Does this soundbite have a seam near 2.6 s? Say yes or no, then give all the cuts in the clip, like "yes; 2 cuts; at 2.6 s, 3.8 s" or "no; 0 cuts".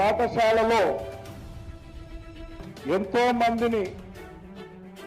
yes; 2 cuts; at 1.1 s, 2.6 s